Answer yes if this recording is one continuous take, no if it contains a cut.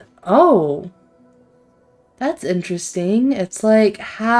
yes